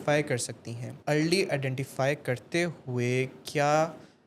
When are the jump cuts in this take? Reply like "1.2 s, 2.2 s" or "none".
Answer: 0.9 s

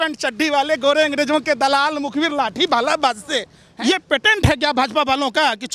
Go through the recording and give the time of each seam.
3.6 s

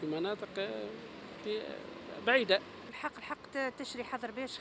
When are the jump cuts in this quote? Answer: 2.9 s

